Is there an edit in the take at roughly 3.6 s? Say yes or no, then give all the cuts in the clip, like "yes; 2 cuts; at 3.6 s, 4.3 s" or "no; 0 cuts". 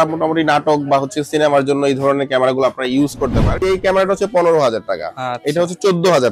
yes; 1 cut; at 3.6 s